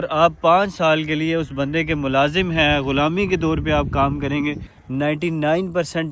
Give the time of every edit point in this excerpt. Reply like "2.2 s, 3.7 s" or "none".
4.7 s